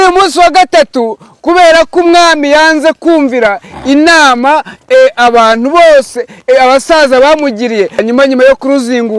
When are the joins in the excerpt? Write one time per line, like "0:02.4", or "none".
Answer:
0:08.0